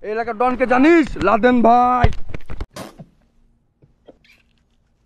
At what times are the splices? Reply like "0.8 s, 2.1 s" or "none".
none